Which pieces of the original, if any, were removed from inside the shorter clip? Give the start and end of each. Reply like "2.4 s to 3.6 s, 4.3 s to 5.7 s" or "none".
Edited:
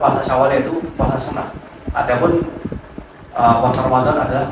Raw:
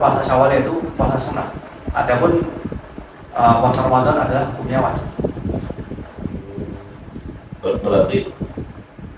none

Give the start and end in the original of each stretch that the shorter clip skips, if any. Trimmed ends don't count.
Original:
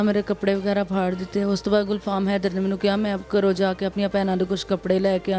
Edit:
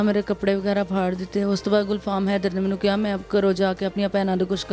none

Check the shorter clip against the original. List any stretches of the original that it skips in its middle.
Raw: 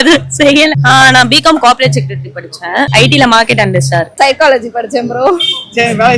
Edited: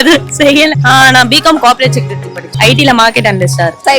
2.6 s to 2.9 s

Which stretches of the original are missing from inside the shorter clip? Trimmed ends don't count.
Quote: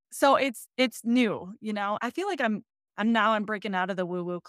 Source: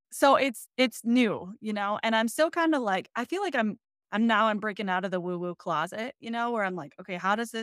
2.0 s to 3.1 s

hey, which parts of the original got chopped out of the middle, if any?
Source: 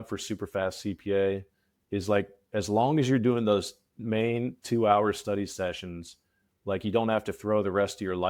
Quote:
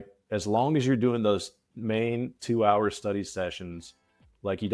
none

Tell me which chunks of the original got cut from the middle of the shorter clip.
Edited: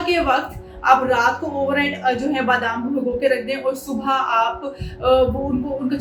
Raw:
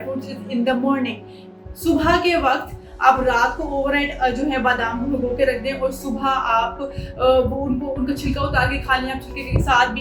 none

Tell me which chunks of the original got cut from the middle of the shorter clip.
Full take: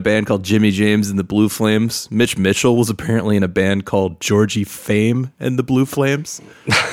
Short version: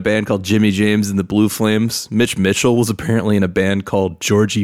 none

